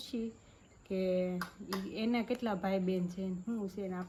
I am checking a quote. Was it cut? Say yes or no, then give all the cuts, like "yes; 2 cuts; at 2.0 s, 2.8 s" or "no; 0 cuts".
no; 0 cuts